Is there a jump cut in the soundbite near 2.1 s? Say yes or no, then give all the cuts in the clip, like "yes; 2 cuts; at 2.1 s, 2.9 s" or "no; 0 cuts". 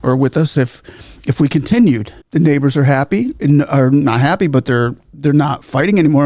yes; 1 cut; at 2.1 s